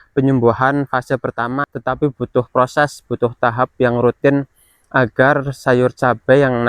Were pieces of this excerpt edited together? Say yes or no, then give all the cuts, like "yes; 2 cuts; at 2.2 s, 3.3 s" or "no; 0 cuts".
yes; 1 cut; at 1.6 s